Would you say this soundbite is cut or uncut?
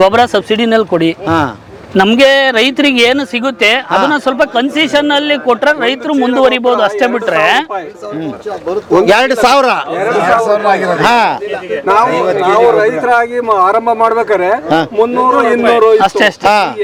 uncut